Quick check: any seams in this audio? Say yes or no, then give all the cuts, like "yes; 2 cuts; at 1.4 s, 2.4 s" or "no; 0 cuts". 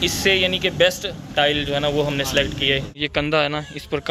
yes; 1 cut; at 2.9 s